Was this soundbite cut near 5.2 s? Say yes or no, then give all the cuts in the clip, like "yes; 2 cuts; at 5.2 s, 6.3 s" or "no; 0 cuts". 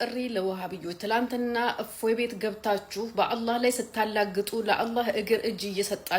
no; 0 cuts